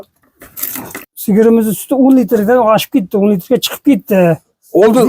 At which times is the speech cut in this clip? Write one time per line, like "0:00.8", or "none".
0:01.1